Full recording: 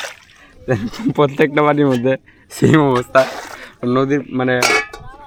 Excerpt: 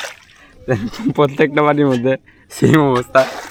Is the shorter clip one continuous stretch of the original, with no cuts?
yes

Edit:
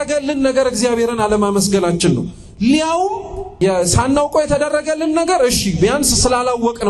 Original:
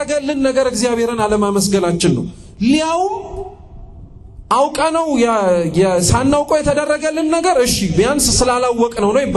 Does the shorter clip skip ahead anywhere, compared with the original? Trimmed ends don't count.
yes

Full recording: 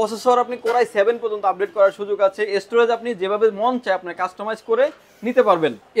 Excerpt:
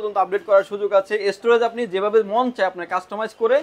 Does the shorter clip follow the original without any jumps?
yes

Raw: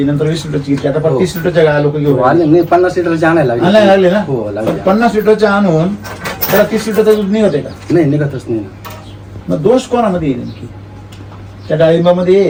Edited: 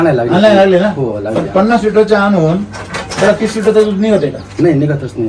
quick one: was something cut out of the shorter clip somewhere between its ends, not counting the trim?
no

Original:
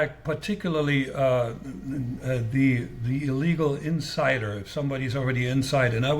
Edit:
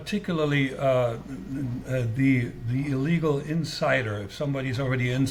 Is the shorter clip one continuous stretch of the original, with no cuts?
yes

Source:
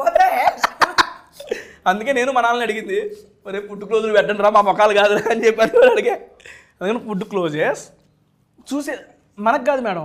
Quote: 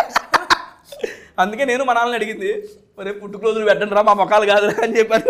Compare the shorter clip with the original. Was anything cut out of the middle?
no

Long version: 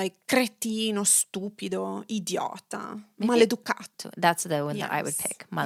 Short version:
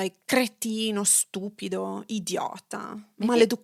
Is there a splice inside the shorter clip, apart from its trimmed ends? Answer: no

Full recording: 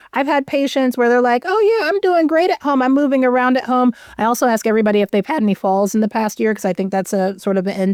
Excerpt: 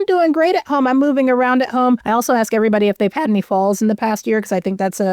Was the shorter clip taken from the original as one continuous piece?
no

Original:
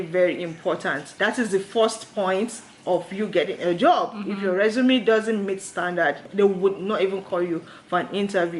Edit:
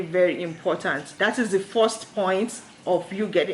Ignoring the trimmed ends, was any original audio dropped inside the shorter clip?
no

